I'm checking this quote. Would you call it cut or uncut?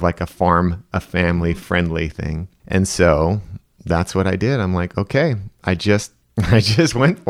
cut